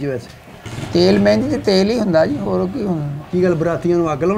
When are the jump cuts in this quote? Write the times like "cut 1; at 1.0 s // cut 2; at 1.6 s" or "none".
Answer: none